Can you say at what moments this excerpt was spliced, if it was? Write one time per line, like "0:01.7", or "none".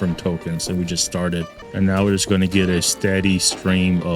0:01.6

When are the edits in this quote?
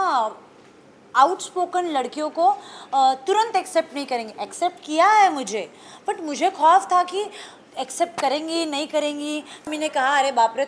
0:09.7

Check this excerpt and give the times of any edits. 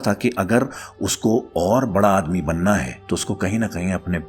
0:02.9

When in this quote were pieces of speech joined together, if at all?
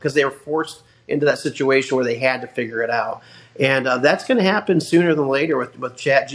none

